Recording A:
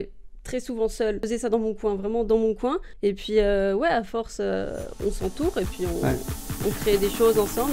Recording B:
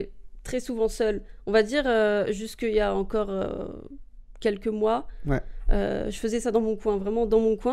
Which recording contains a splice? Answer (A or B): A